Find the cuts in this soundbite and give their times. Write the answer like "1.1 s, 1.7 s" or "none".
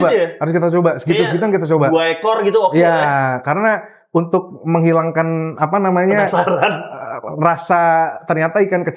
none